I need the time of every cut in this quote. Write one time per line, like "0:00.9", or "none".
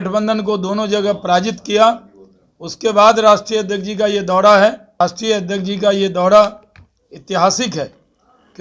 0:05.0